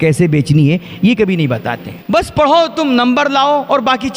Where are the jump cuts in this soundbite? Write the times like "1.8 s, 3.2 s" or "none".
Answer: 2.0 s

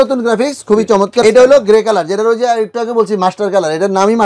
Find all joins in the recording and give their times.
1.2 s

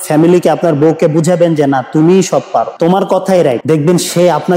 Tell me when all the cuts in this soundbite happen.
2.7 s, 3.6 s

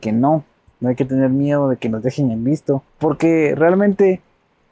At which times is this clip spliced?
2.9 s

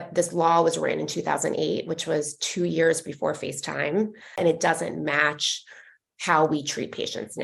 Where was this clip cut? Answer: 4.4 s

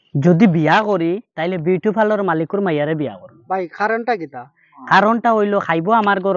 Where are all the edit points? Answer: none

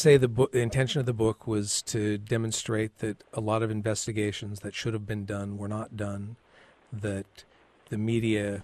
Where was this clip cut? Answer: none

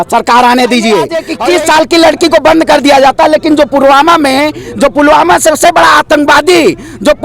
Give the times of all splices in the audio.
1.2 s

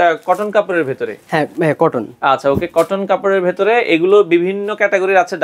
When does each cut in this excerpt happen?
none

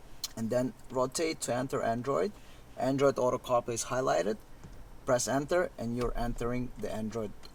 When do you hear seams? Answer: none

